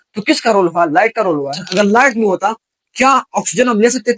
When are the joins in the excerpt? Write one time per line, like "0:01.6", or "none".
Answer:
0:01.6